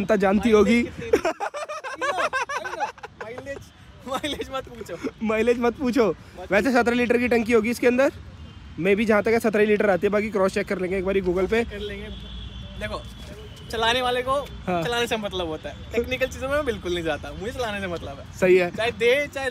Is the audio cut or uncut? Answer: uncut